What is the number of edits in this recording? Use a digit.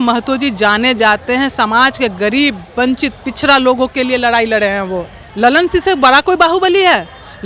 1